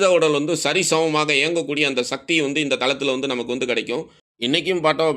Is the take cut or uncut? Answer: cut